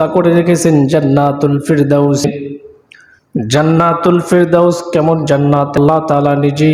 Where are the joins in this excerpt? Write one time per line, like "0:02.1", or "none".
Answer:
0:02.2
0:05.8